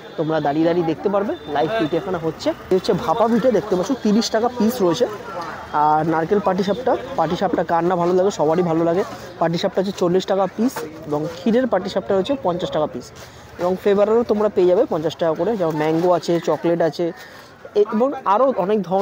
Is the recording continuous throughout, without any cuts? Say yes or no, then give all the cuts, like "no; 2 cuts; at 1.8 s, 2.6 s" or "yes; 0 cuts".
yes; 0 cuts